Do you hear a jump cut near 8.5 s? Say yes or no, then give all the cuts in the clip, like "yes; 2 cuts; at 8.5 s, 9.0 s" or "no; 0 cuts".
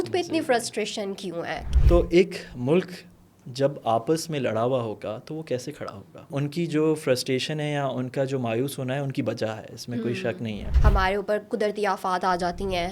no; 3 cuts; at 1.6 s, 6.3 s, 10.7 s